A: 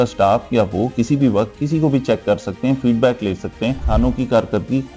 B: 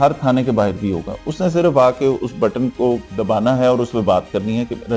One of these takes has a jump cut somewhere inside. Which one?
A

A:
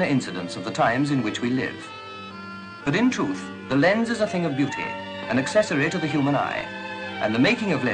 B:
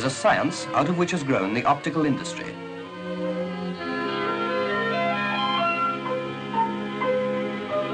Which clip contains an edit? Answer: A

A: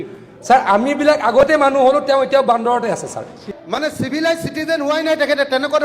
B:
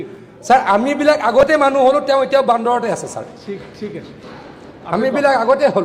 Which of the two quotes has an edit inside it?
A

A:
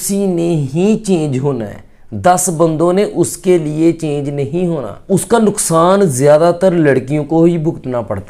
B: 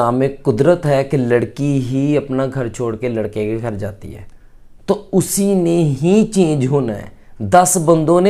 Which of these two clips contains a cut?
A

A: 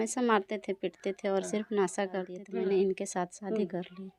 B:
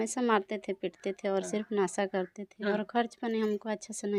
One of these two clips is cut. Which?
A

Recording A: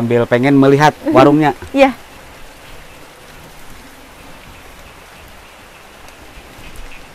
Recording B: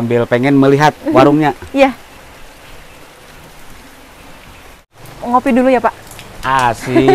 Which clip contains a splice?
B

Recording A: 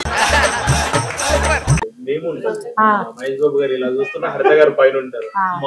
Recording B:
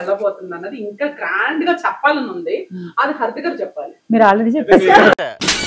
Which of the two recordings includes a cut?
A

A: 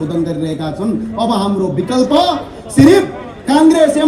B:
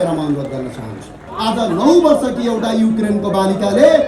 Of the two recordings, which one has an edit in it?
B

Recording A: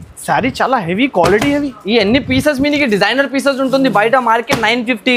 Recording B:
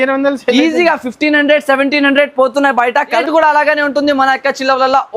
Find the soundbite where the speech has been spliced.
B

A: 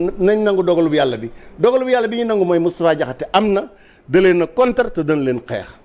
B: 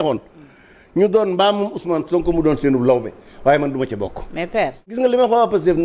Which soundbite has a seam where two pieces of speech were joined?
B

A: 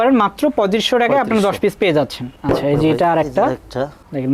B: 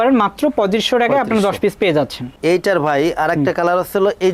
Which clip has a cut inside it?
B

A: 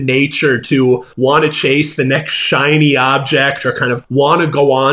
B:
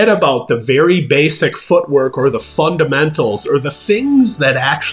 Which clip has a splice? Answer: A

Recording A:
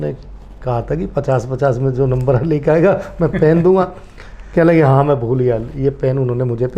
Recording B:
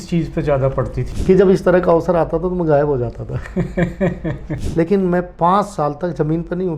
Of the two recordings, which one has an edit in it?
B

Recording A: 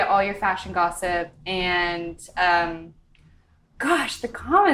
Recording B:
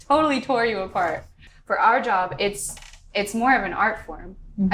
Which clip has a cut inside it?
B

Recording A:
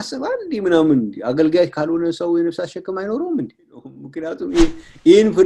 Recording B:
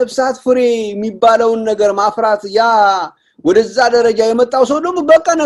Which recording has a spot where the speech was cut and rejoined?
A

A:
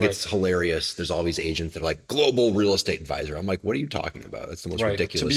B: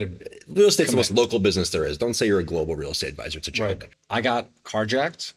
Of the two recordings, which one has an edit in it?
B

